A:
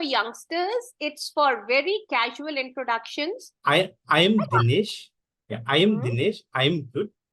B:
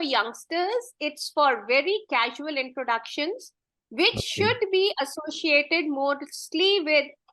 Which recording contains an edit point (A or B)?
A